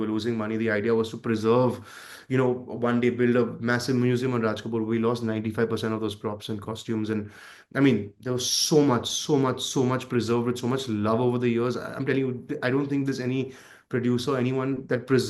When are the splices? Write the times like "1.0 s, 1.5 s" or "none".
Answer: none